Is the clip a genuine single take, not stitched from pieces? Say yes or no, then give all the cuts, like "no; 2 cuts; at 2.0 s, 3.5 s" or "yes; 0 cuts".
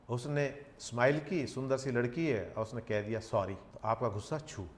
no; 1 cut; at 3.7 s